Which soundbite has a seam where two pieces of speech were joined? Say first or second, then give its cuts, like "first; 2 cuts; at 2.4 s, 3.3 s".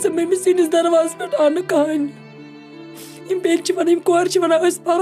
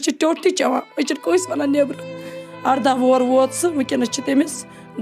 second; 1 cut; at 2.4 s